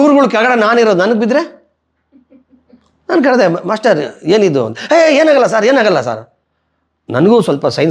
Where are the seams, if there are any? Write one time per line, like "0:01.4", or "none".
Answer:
none

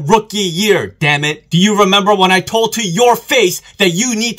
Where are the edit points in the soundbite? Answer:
0:01.4

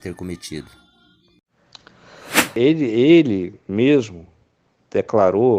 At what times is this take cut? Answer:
0:02.5

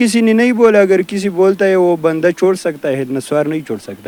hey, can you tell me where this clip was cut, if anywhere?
none

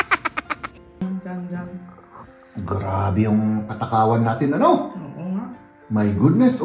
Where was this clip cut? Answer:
0:01.0

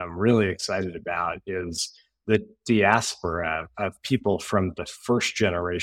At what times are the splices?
none

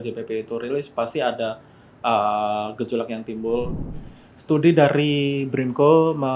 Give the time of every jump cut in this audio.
0:03.8

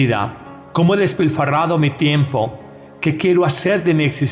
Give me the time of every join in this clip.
none

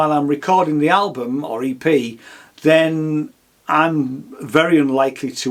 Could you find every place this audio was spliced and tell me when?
none

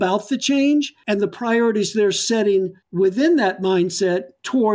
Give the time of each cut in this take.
0:01.0
0:02.8

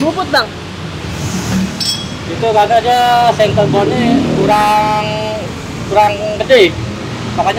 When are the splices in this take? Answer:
none

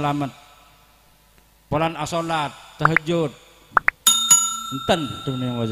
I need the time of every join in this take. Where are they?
0:03.6
0:04.5

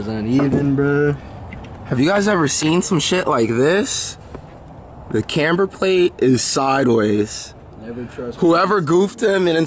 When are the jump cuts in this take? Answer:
none

